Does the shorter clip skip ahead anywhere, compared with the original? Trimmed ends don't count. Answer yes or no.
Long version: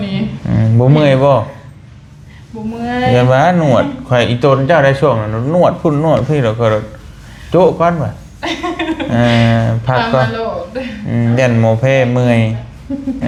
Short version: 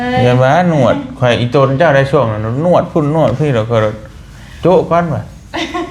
no